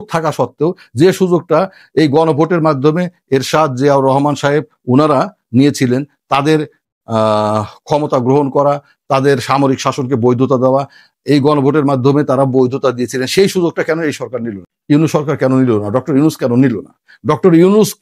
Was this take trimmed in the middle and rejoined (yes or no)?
no